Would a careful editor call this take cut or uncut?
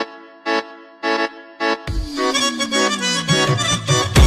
uncut